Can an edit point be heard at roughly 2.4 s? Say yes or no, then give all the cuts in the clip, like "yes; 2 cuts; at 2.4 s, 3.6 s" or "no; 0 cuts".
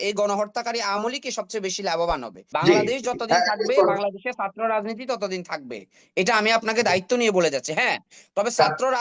yes; 1 cut; at 2.4 s